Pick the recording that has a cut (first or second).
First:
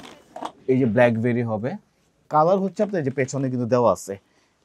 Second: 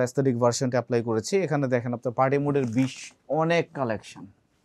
first